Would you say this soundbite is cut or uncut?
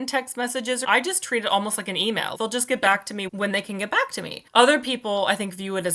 cut